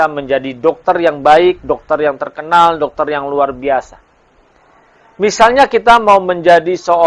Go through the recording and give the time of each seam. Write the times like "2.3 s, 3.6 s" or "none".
none